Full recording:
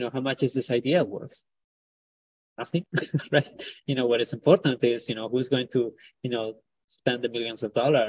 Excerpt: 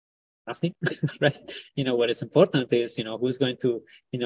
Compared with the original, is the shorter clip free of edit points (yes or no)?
yes